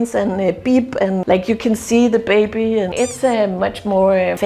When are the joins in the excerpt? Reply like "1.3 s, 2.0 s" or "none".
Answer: none